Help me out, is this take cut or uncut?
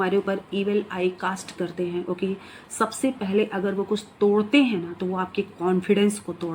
uncut